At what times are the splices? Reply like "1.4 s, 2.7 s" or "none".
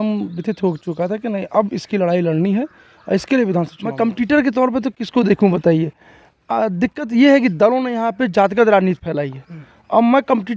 3.8 s